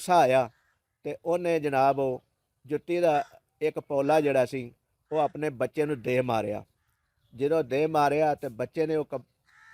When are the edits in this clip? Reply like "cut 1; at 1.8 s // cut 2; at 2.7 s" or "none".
none

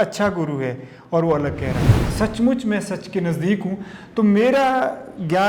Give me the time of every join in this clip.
cut 1; at 2.1 s

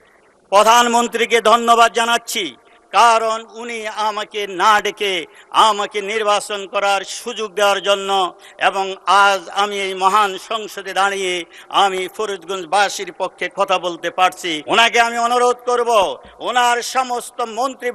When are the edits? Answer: cut 1; at 14.5 s

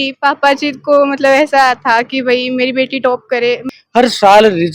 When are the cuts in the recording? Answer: cut 1; at 3.7 s

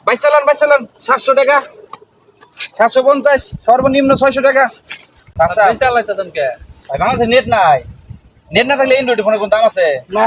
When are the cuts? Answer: cut 1; at 5.3 s

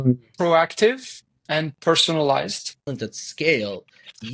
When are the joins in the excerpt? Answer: cut 1; at 2.9 s

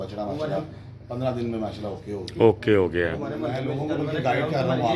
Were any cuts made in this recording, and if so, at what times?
none

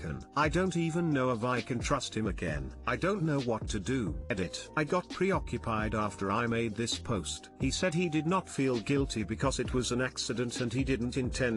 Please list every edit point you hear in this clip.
cut 1; at 4.3 s

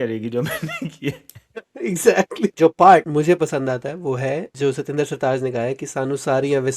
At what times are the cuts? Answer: cut 1; at 2.5 s // cut 2; at 3.1 s // cut 3; at 4.5 s

